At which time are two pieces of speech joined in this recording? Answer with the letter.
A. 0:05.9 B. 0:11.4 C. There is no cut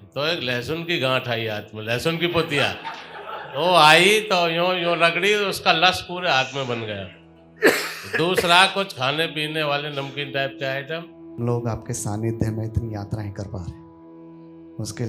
B